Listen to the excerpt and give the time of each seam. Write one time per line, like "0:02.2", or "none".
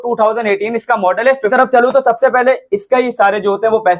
0:01.5